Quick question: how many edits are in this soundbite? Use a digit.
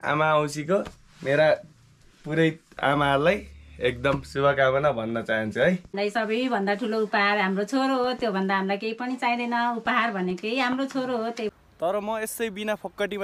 2